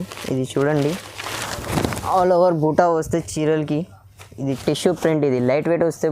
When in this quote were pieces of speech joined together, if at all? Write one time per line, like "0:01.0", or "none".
0:04.6